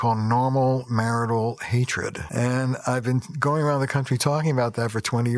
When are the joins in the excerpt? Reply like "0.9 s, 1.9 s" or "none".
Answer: 2.2 s